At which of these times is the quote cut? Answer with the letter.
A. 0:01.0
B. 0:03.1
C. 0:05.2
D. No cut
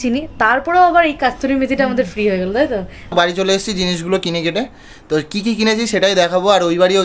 B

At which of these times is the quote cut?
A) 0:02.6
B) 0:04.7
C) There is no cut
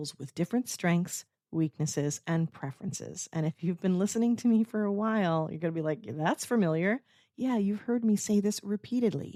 C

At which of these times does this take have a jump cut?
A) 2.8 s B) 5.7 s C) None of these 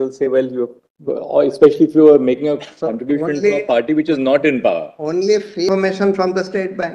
B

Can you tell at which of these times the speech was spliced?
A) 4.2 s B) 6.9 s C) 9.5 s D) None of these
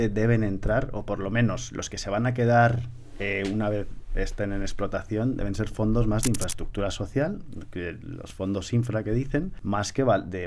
C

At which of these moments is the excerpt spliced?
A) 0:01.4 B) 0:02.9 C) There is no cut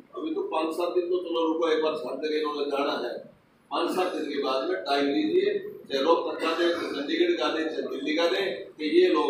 C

